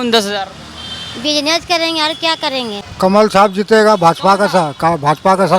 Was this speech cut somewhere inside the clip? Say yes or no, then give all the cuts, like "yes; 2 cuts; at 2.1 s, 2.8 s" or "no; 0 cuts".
yes; 1 cut; at 2.8 s